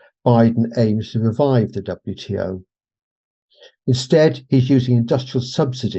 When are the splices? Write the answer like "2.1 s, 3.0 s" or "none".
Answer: none